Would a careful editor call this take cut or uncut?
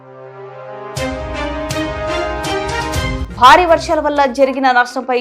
uncut